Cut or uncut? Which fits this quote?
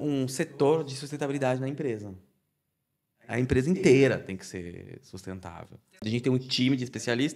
cut